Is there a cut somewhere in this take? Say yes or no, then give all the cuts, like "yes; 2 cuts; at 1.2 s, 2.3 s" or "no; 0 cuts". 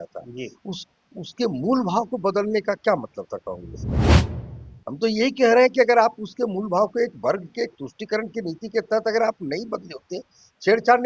no; 0 cuts